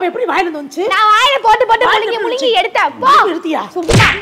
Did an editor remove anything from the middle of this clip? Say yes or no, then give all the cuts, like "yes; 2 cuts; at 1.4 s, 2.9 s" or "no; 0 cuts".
no; 0 cuts